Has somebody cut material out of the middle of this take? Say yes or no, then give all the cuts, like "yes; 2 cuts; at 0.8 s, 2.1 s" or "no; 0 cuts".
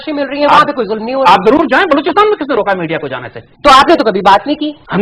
no; 0 cuts